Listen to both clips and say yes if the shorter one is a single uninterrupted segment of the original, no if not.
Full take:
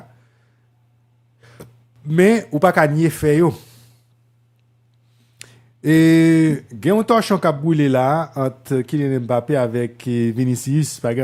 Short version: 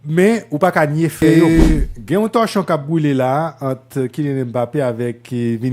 no